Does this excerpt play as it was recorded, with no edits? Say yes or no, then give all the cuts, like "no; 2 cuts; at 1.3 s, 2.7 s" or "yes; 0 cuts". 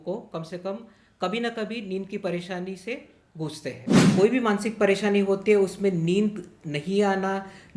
no; 1 cut; at 4.0 s